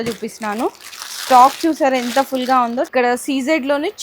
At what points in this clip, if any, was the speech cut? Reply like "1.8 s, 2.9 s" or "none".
2.9 s